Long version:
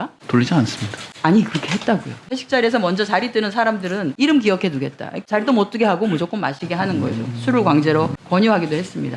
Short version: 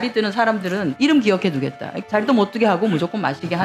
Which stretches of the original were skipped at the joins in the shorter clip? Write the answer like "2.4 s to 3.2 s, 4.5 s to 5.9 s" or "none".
none